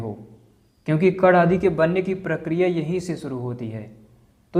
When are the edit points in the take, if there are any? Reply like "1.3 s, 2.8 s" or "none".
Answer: none